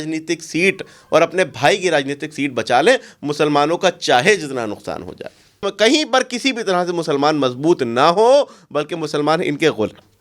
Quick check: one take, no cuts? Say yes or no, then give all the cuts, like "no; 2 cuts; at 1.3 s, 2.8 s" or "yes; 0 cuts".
no; 1 cut; at 5.6 s